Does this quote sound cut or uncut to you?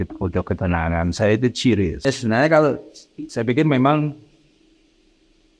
cut